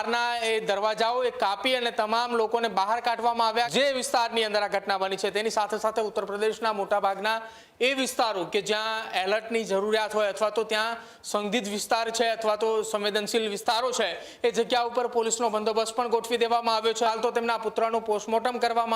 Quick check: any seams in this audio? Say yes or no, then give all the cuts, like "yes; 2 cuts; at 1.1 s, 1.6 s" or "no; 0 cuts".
yes; 2 cuts; at 3.7 s, 17.1 s